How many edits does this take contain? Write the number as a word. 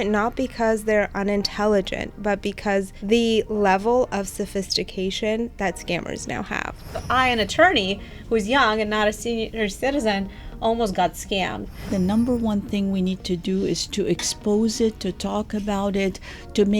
four